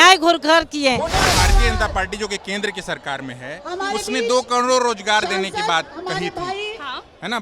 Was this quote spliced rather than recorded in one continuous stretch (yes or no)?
yes